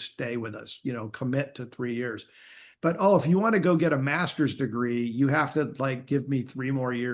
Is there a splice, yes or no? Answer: no